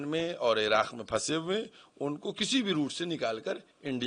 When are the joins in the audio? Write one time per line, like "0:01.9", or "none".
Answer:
none